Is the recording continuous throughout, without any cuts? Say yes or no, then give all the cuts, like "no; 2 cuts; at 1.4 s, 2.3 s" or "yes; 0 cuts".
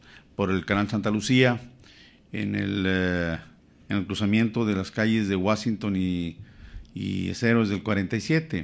no; 1 cut; at 3.4 s